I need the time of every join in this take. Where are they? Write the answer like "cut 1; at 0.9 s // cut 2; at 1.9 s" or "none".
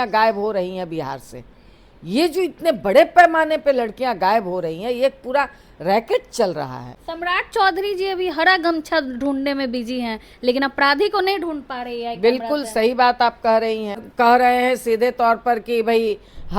cut 1; at 6.8 s // cut 2; at 14.1 s